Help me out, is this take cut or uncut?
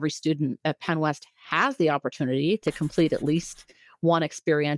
uncut